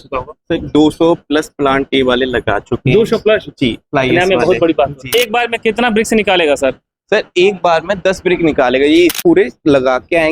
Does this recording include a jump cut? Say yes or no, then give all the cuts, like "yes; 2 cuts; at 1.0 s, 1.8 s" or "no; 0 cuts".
yes; 2 cuts; at 5.1 s, 9.1 s